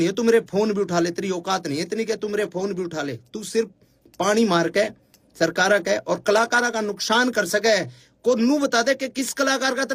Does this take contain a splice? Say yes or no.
no